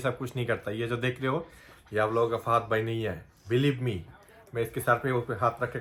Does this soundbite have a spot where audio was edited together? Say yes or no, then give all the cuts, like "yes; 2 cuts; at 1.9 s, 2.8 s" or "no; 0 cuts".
no; 0 cuts